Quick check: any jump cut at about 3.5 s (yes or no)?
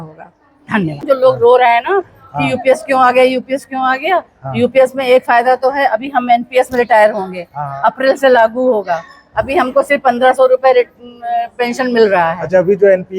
no